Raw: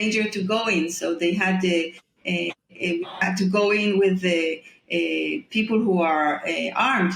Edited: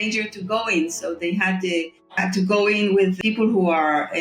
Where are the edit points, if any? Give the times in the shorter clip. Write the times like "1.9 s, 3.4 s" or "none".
2.1 s, 3.2 s